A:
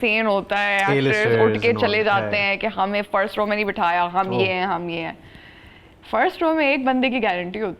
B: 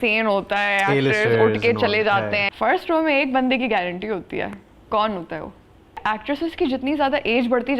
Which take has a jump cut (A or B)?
B